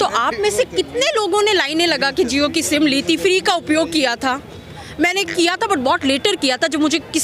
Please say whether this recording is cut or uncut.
uncut